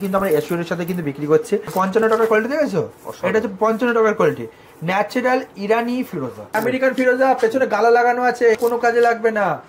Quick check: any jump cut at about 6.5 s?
yes; 3 cuts; at 1.7 s, 6.5 s, 8.6 s

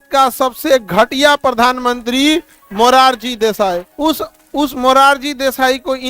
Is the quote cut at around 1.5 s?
no; 1 cut; at 3.9 s

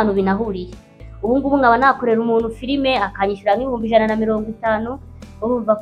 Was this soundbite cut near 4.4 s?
no; 1 cut; at 1.0 s

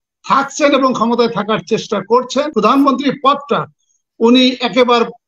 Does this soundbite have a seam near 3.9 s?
no; 1 cut; at 2.5 s

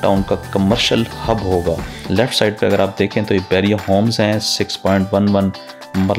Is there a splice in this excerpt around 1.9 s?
yes; 1 cut; at 1.9 s

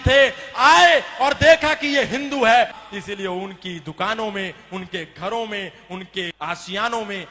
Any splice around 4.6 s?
no; 2 cuts; at 2.8 s, 6.3 s

